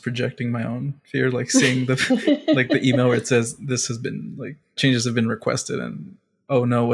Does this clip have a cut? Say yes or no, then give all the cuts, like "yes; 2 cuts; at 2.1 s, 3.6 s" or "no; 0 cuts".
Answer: no; 0 cuts